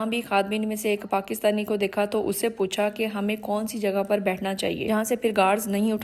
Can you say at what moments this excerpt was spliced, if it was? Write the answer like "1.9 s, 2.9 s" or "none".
none